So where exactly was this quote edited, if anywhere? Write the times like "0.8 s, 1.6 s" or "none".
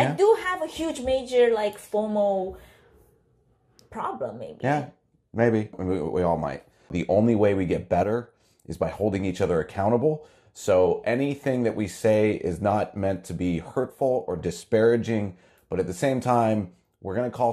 6.9 s